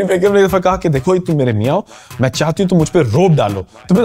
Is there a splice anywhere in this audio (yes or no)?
no